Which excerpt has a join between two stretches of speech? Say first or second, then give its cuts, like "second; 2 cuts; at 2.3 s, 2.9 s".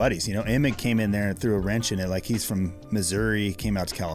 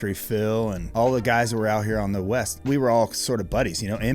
second; 2 cuts; at 0.8 s, 2.6 s